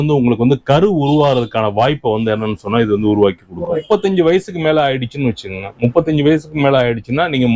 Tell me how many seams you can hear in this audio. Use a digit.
1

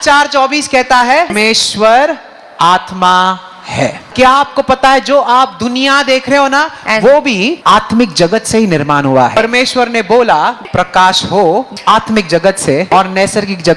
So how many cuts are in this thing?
7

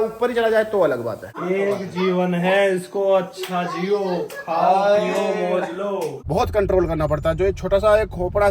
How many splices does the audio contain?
2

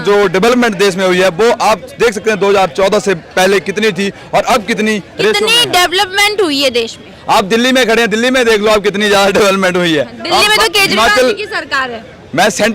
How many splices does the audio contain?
0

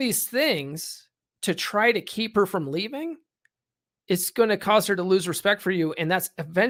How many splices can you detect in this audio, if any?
0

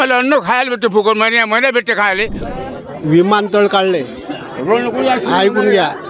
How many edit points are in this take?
1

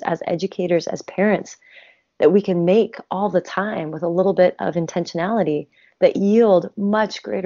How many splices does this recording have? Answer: 0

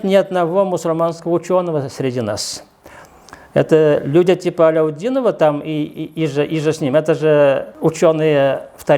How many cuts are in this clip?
1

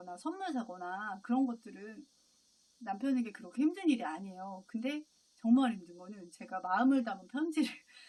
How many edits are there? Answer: 0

